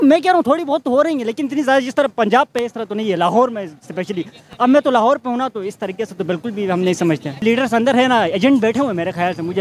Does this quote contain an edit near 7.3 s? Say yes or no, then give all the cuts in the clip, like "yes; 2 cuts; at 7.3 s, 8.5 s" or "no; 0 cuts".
yes; 1 cut; at 7.3 s